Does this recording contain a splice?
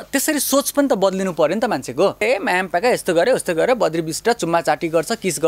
yes; 1 cut; at 2.2 s

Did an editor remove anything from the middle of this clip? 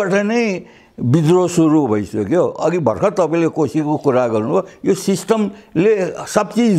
no; 0 cuts

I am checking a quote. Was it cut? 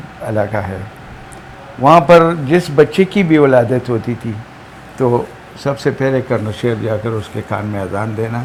no; 0 cuts

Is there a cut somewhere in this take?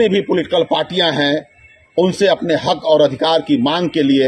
no; 0 cuts

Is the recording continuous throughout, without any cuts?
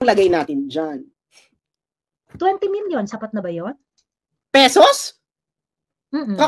yes; 0 cuts

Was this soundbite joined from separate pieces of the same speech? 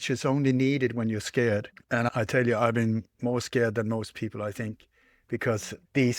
yes; 1 cut; at 1.8 s

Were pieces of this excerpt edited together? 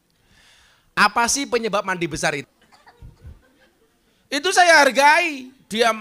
yes; 1 cut; at 2.4 s

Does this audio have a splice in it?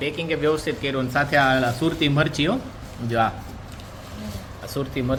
no; 0 cuts

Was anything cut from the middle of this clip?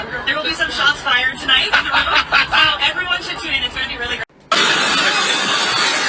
no; 0 cuts

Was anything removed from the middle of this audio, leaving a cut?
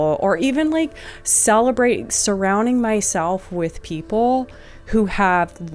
no; 0 cuts

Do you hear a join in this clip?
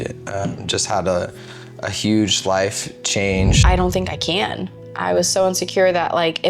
yes; 1 cut; at 3.6 s

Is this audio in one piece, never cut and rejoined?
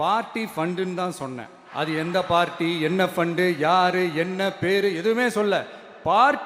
no; 1 cut; at 1.6 s

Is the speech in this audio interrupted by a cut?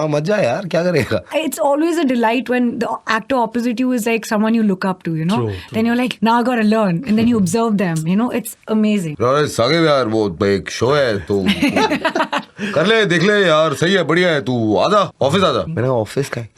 yes; 4 cuts; at 1.3 s, 6.1 s, 9.1 s, 15.3 s

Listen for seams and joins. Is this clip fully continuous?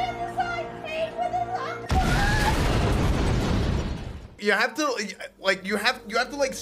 no; 1 cut; at 4.4 s

